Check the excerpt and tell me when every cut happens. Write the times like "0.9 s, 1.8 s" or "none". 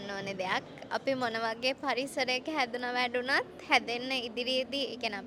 none